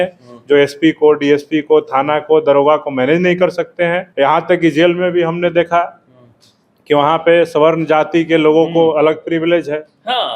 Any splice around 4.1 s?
yes; 1 cut; at 4.1 s

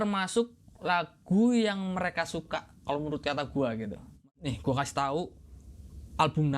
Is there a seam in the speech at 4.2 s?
yes; 1 cut; at 4.2 s

